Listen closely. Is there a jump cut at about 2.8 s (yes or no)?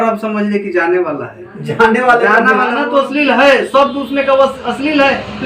yes